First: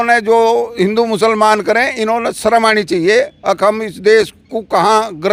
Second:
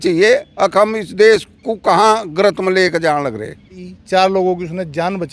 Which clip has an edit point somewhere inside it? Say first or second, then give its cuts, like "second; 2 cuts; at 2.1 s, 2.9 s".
second; 1 cut; at 3.9 s